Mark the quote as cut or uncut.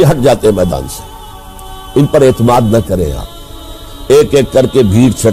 cut